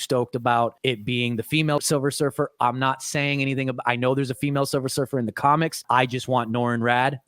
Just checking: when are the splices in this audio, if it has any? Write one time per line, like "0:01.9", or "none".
0:00.8
0:01.8